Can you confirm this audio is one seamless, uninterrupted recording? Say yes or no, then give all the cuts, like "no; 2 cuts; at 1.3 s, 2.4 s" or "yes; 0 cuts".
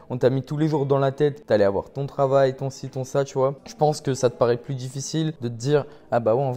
no; 3 cuts; at 1.4 s, 3.6 s, 5.5 s